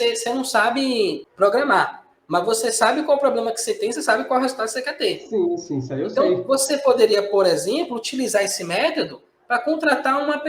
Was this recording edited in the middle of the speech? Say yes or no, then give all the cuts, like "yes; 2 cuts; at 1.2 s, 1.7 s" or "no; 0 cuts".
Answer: yes; 1 cut; at 1.2 s